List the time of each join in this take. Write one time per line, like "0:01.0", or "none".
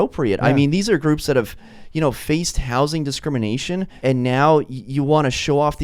0:03.9